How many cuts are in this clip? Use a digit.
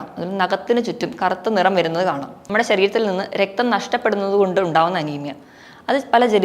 1